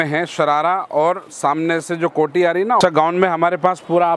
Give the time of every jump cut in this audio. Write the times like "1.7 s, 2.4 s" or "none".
2.8 s